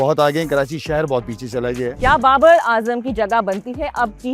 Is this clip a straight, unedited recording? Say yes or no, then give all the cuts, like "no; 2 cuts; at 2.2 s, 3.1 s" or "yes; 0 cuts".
no; 1 cut; at 1.9 s